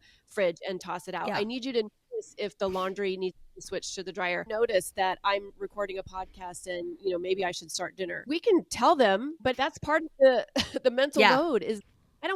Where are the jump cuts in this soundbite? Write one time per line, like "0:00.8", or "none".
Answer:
0:04.5
0:08.2
0:09.4

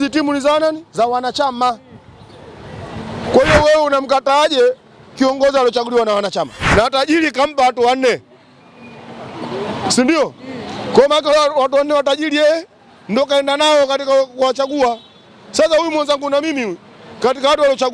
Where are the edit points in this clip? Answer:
0:06.6

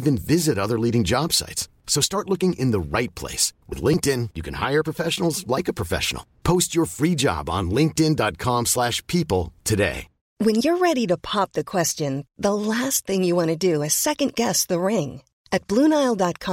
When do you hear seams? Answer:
0:10.3

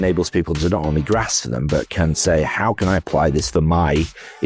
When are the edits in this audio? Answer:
none

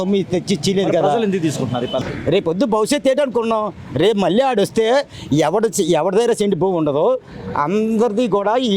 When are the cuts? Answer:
0:02.0

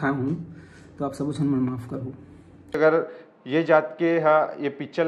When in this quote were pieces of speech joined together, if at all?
0:02.8

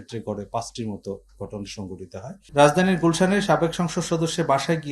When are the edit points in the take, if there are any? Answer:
0:02.4

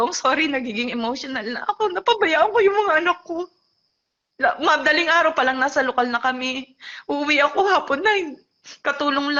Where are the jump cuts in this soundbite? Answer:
none

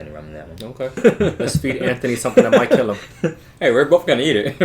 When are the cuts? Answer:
0:01.0

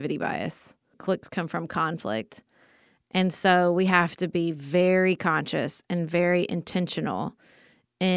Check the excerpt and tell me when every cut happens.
0:00.9

